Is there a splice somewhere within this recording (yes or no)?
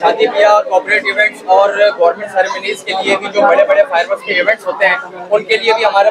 no